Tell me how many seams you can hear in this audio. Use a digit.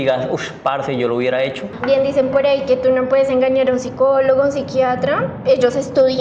1